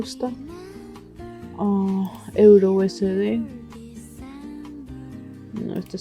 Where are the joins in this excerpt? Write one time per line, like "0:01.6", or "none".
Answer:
0:03.7
0:05.0